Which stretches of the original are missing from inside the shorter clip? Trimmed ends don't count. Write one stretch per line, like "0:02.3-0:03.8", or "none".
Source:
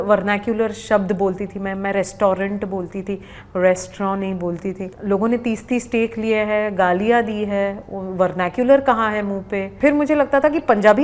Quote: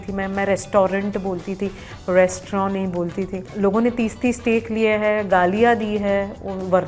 none